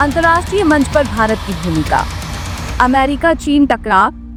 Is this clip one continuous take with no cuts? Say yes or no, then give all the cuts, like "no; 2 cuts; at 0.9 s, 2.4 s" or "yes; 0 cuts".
yes; 0 cuts